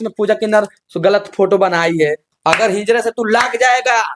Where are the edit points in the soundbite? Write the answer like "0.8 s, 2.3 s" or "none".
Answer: 2.3 s